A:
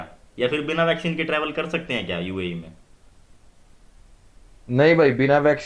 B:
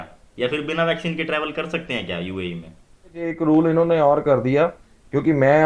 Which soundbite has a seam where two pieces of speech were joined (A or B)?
B